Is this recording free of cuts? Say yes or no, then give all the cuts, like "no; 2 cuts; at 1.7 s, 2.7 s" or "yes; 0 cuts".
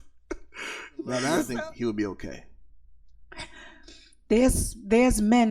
no; 1 cut; at 1.5 s